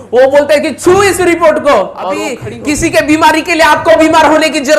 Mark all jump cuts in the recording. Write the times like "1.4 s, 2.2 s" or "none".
2.4 s